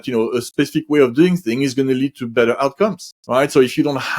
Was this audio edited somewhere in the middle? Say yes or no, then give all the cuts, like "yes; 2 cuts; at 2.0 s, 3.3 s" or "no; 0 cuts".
yes; 1 cut; at 3.1 s